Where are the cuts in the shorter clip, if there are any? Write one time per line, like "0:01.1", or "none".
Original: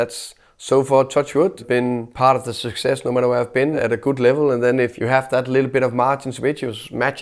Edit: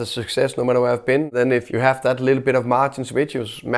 0:01.3